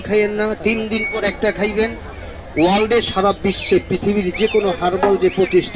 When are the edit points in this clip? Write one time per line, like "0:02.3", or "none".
none